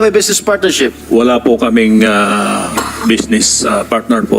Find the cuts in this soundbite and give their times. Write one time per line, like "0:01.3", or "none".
0:01.0